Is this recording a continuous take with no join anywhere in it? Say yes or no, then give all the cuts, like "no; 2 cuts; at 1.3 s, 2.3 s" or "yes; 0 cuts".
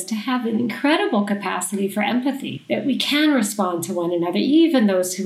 no; 1 cut; at 2.5 s